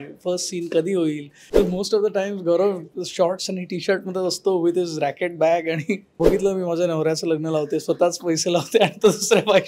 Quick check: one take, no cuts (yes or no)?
no